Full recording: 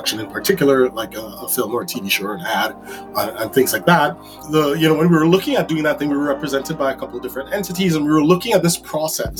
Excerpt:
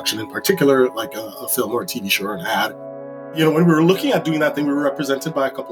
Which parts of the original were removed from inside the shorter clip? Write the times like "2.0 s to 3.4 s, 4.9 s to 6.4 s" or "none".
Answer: 3.3 s to 4.7 s